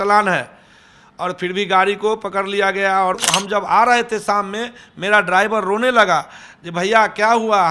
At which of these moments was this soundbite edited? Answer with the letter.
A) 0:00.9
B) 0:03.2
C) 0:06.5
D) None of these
B